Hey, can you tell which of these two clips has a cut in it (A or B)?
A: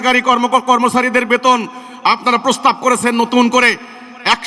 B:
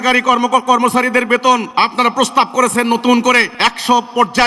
B